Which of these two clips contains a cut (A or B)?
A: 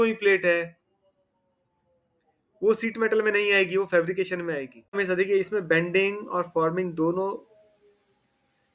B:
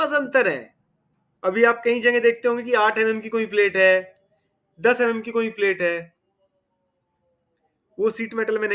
A